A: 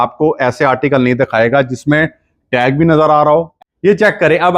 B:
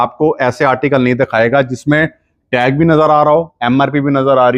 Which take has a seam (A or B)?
A